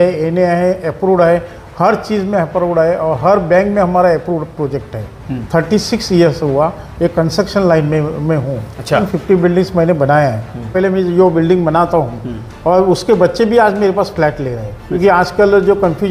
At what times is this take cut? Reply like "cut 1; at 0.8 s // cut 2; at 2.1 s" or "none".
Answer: cut 1; at 5.4 s // cut 2; at 9.1 s // cut 3; at 10.7 s // cut 4; at 15.0 s